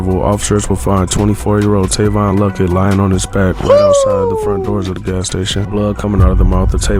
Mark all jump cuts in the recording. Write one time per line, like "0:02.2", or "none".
0:05.7